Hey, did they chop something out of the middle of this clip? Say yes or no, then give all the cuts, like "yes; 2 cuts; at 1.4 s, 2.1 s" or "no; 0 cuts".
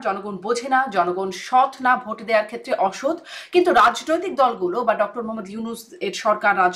no; 0 cuts